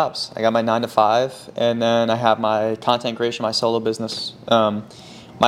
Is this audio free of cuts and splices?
yes; 0 cuts

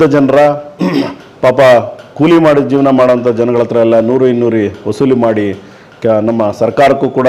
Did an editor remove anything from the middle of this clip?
no; 0 cuts

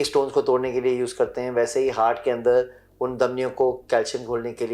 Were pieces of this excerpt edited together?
no; 0 cuts

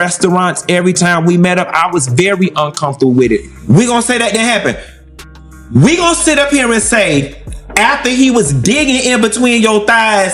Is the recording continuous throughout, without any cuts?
no; 1 cut; at 3.5 s

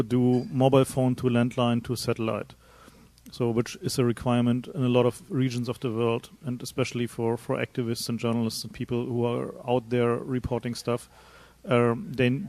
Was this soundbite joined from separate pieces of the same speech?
yes; 1 cut; at 4.2 s

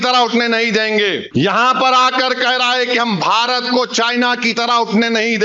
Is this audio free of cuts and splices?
no; 1 cut; at 1.2 s

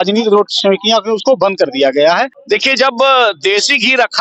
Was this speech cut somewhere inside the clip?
yes; 1 cut; at 2.4 s

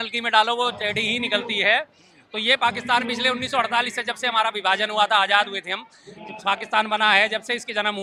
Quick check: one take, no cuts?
yes; 0 cuts

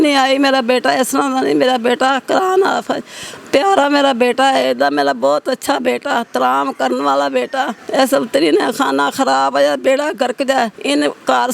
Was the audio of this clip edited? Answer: no; 0 cuts

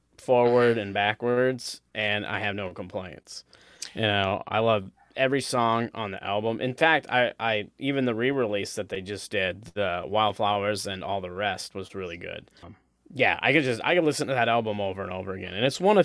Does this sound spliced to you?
yes; 1 cut; at 12.6 s

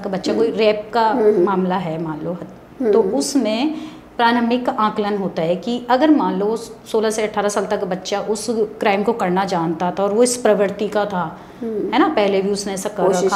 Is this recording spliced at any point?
no; 0 cuts

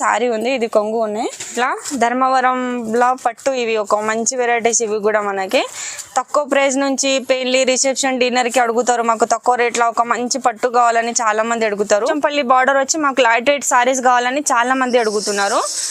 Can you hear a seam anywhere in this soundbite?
yes; 2 cuts; at 1.5 s, 12.1 s

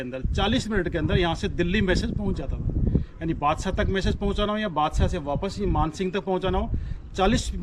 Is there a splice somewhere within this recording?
no; 0 cuts

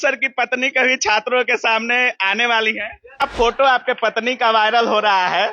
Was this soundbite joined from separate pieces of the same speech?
yes; 1 cut; at 3.2 s

